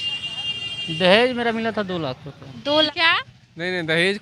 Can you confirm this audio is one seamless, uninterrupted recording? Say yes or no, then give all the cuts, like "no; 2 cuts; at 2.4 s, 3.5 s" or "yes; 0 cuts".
no; 1 cut; at 2.9 s